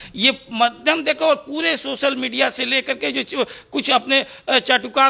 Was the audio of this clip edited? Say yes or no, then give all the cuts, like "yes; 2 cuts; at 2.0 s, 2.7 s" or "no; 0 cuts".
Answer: no; 0 cuts